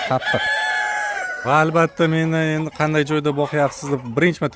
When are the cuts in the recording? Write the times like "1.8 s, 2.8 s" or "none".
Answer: 1.3 s